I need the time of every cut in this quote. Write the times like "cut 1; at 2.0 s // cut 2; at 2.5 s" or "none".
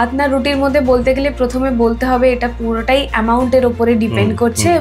none

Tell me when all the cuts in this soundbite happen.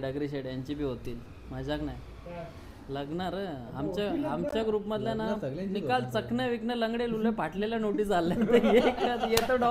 none

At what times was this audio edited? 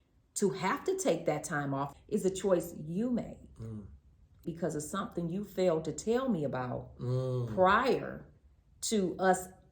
cut 1; at 1.9 s

